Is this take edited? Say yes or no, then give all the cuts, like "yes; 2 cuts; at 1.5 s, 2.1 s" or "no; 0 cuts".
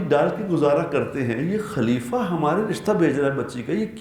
no; 0 cuts